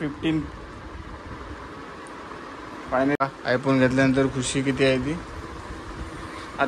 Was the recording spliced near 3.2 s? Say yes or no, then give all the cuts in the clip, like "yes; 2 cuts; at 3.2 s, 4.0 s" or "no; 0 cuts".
yes; 1 cut; at 3.2 s